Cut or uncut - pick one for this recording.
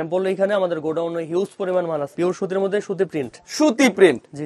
cut